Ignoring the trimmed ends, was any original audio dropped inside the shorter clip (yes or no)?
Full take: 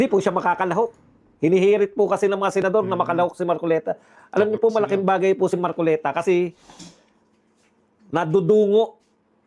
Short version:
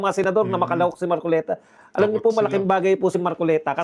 no